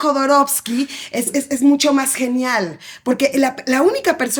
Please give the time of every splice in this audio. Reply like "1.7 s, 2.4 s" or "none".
none